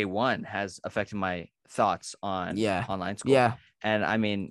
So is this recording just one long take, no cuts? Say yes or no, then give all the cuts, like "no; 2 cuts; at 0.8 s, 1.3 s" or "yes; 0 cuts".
no; 1 cut; at 1.6 s